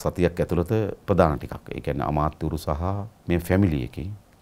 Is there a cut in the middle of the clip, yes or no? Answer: yes